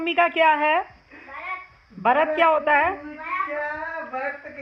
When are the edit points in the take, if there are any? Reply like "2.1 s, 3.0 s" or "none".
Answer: none